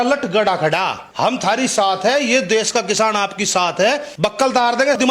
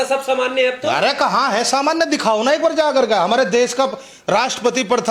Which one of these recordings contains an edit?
first; 2 cuts; at 1.0 s, 4.1 s

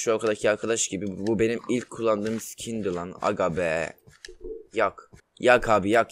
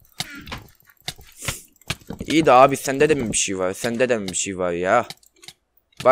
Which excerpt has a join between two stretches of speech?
first; 1 cut; at 5.1 s

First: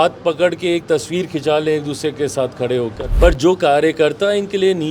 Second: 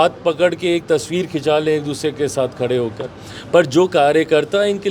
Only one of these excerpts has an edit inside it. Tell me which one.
first; 1 cut; at 3.0 s

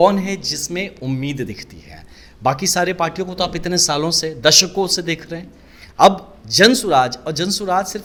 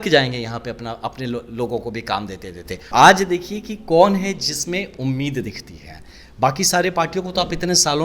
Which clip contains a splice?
second; 1 cut; at 2.9 s

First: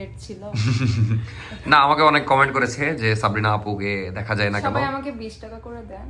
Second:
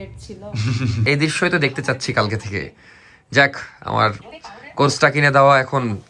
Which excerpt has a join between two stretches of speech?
second; 1 cut; at 1.0 s

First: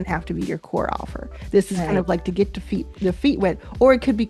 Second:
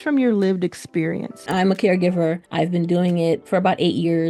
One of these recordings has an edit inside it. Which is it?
second; 3 cuts; at 1.5 s, 2.4 s, 3.4 s

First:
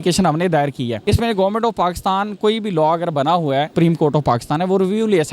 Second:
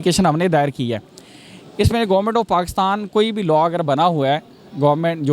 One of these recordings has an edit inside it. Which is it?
first; 2 cuts; at 1.0 s, 3.7 s

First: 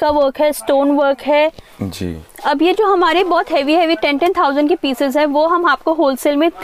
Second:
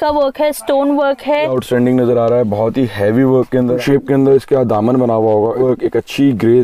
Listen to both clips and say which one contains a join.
second; 3 cuts; at 1.6 s, 3.8 s, 5.6 s

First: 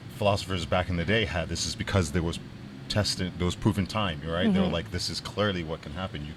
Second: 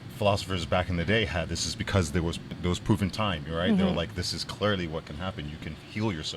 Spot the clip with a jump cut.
second; 1 cut; at 2.6 s

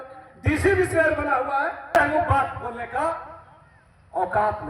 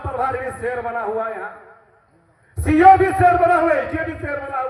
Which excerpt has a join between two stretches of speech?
first; 1 cut; at 2.0 s

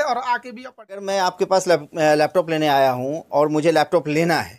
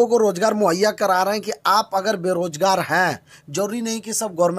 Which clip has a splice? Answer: first; 1 cut; at 1.1 s

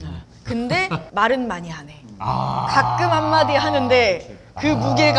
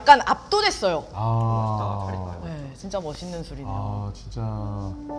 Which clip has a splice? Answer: first; 1 cut; at 1.1 s

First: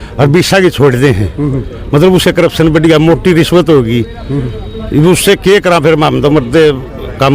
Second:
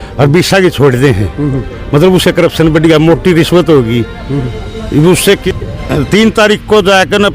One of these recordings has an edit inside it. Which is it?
second; 1 cut; at 5.4 s

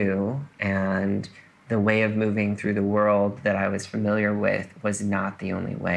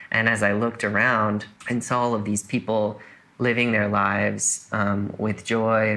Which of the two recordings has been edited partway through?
second; 1 cut; at 1.5 s

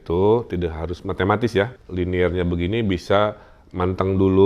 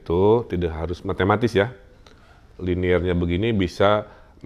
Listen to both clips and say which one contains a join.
first; 1 cut; at 1.8 s

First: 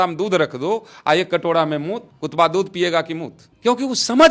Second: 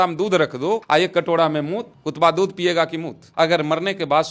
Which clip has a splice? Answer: second; 2 cuts; at 0.8 s, 3.3 s

